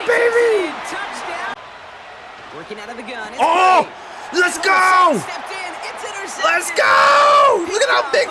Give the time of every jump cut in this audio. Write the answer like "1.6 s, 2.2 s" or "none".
1.6 s